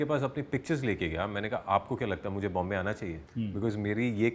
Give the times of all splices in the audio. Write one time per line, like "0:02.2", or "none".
0:03.2